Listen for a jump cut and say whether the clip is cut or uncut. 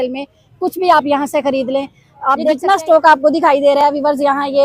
cut